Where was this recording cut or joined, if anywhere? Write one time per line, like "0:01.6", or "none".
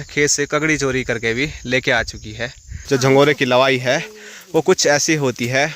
0:02.8